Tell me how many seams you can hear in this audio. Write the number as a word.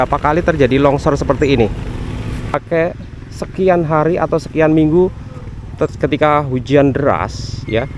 one